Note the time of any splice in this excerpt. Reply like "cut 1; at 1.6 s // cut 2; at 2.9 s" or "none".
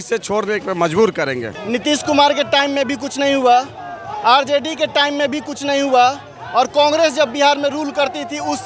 cut 1; at 1.5 s